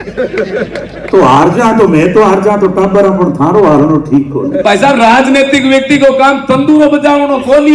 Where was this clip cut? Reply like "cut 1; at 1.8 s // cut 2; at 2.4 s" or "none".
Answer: cut 1; at 4.6 s